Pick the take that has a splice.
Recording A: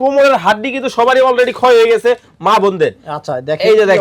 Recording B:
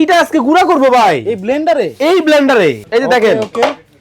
B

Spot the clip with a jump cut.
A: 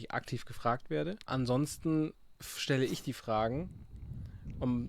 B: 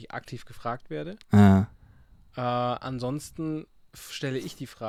A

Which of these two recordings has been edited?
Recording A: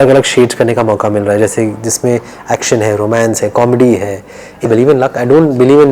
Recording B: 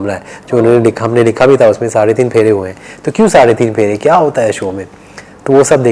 A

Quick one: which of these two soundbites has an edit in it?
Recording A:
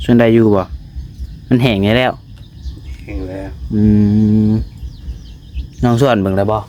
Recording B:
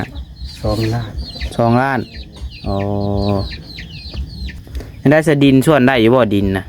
B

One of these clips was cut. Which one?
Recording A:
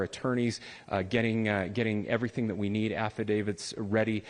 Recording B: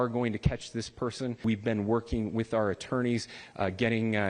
B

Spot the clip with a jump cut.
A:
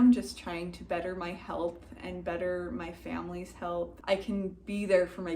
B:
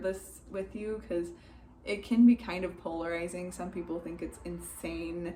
A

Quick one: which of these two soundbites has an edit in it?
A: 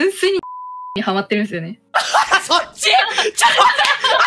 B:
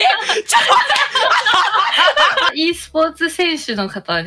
B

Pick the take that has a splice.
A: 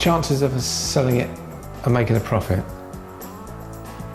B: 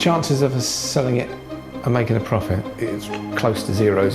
B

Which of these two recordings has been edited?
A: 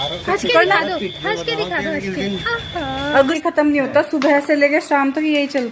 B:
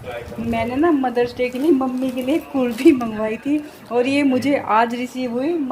A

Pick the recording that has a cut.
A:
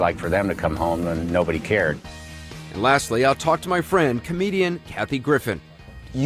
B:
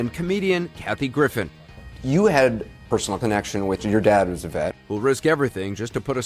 A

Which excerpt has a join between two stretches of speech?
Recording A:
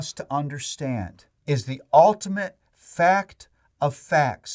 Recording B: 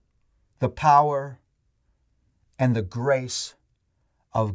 A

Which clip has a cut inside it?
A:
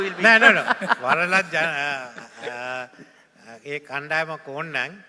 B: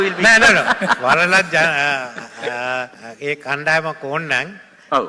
B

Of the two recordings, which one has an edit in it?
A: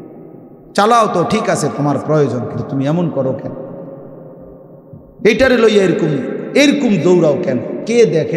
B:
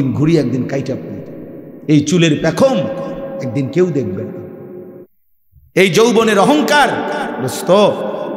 B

